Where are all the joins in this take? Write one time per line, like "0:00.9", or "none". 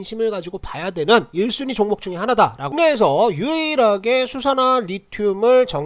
0:02.7